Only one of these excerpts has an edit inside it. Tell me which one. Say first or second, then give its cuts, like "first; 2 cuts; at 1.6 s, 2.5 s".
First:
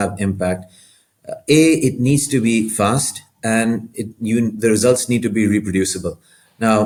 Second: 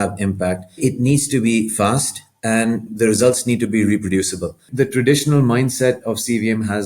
second; 3 cuts; at 0.8 s, 2.9 s, 4.7 s